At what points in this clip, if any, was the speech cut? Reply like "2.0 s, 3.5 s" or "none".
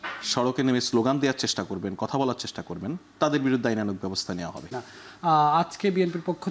4.8 s